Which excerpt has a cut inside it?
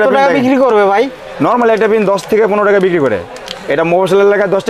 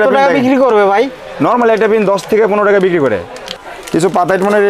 second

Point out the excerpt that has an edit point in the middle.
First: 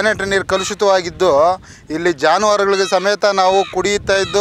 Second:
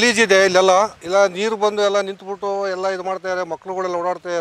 second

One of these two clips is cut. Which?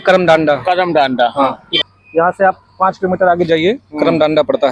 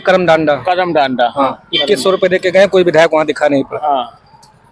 first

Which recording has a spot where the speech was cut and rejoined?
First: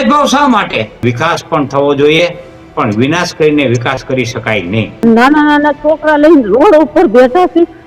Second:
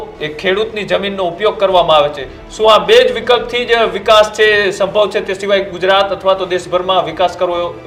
first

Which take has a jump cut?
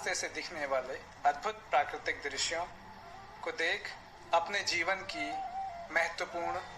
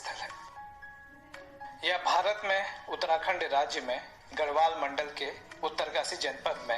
second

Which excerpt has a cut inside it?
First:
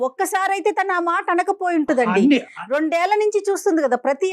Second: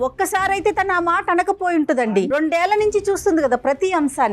second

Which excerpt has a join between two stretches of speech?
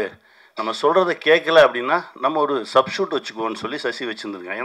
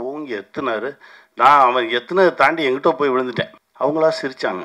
second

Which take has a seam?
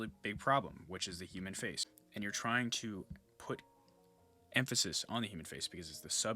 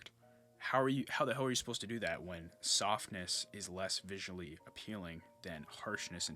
first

